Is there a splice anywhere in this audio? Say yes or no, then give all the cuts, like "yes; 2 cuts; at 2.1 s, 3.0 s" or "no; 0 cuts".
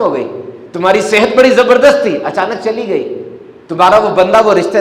no; 0 cuts